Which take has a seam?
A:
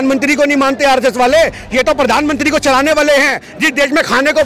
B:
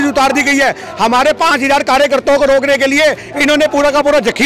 A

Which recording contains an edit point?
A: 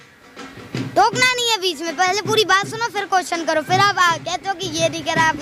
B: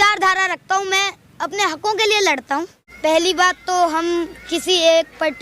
B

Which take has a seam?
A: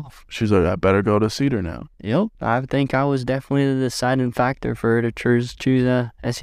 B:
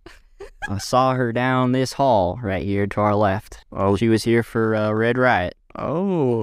A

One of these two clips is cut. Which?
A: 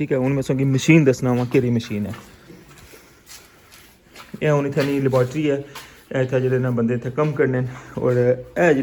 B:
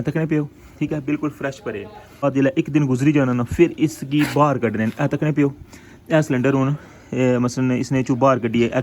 B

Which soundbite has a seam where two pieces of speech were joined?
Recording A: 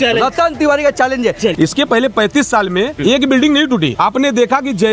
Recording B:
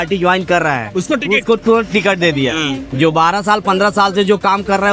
A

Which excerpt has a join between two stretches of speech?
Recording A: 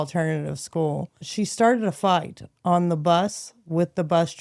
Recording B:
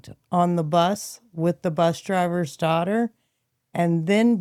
A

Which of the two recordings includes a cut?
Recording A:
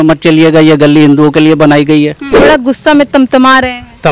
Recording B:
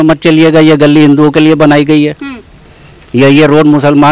A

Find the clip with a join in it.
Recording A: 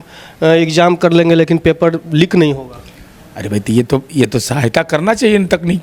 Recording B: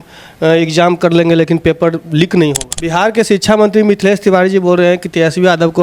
B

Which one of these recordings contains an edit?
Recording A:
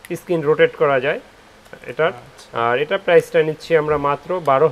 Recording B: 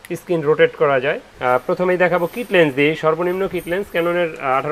B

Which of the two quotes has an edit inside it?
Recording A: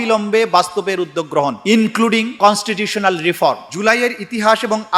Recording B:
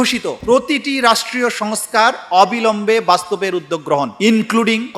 A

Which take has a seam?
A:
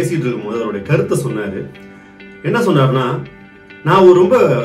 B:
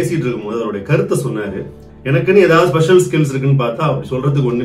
B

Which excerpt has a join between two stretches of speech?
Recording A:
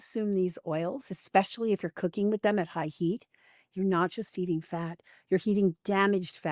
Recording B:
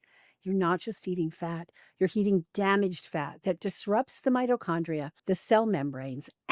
B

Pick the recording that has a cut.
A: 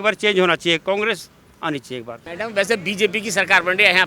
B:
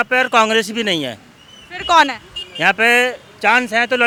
A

